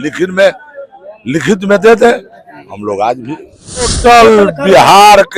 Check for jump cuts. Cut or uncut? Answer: cut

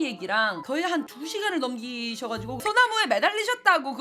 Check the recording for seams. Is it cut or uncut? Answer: cut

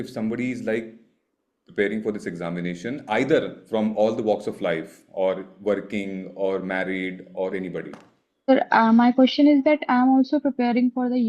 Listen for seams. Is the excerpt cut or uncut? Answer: cut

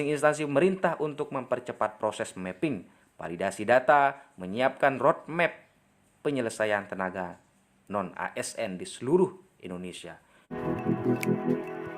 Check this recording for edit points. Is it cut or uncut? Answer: cut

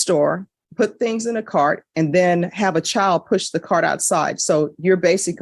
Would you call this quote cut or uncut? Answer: uncut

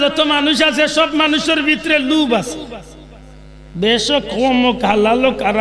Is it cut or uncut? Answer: uncut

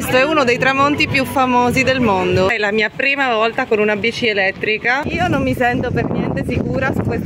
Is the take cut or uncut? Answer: cut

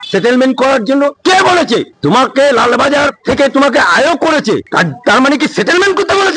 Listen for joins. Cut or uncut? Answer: uncut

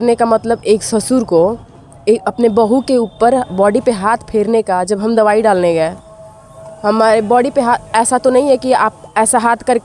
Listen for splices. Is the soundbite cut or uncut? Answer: uncut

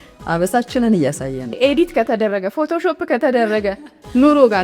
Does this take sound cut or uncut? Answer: cut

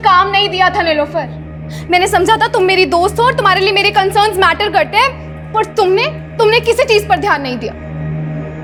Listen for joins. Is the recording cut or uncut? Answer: uncut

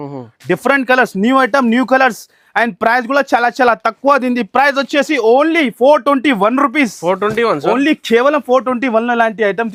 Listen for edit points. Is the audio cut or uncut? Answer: uncut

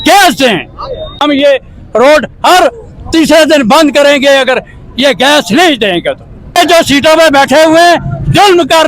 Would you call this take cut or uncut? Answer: cut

